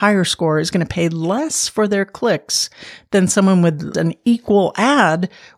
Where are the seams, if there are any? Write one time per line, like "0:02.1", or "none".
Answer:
0:03.9